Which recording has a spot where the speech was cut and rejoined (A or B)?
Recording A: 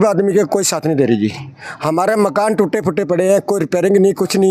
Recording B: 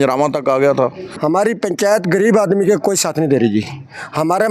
B